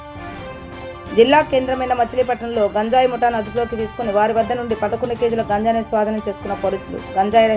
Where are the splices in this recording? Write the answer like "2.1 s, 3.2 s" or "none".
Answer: 0.9 s